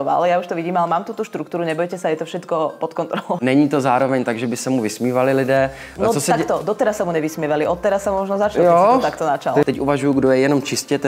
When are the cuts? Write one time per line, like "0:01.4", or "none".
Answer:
0:03.4
0:09.7